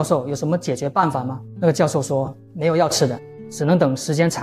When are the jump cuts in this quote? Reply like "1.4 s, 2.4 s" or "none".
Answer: 1.4 s, 3.3 s